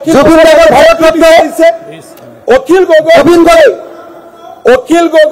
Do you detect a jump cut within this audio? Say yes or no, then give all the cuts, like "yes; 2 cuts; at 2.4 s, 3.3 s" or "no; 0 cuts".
no; 0 cuts